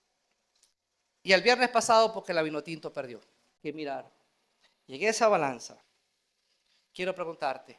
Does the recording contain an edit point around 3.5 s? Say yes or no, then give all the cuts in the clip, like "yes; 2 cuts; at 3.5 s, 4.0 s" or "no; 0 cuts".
yes; 1 cut; at 3.5 s